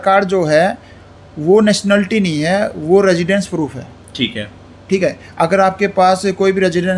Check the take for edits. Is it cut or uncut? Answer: uncut